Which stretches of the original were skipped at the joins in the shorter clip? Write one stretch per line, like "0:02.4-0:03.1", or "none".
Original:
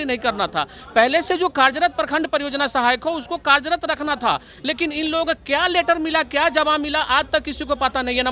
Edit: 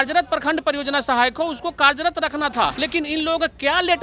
0:04.5-0:04.7